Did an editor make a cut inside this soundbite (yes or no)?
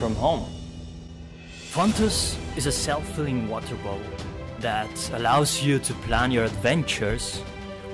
yes